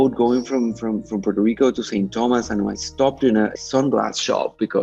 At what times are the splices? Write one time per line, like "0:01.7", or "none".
0:03.5